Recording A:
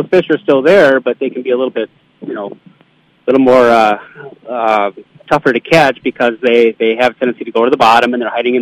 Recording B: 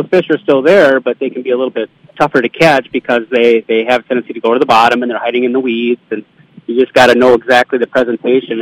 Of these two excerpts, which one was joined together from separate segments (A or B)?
B